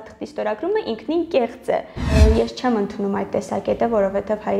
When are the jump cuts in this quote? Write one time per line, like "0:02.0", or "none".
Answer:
0:02.2